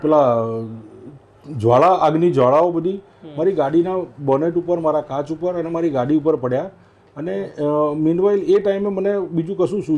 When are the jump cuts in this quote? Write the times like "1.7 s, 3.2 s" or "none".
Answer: none